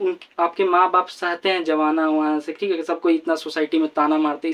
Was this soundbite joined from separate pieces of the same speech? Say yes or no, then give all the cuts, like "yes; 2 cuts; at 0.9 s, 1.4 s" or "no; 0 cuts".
no; 0 cuts